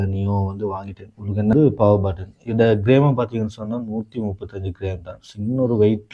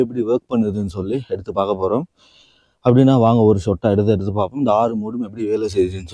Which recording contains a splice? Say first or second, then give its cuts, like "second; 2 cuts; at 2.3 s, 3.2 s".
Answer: first; 1 cut; at 1.5 s